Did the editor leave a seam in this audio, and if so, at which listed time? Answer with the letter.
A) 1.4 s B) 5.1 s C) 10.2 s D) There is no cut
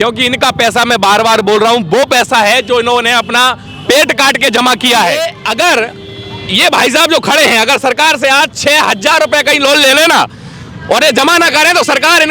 B